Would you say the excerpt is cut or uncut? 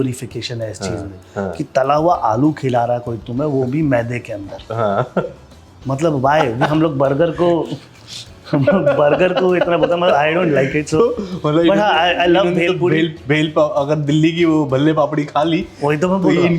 uncut